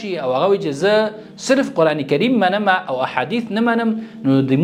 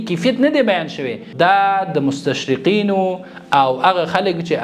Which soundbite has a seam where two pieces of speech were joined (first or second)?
second